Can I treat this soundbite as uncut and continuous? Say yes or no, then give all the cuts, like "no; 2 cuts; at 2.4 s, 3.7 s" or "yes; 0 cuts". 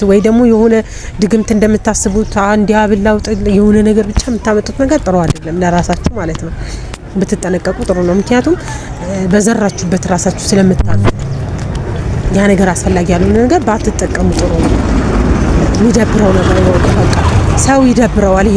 yes; 0 cuts